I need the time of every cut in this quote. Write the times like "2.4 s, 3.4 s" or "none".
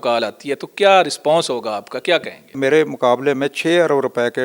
2.5 s